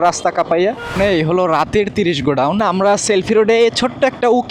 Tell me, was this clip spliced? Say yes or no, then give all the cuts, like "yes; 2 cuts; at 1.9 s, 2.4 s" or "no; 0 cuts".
yes; 2 cuts; at 0.9 s, 2.6 s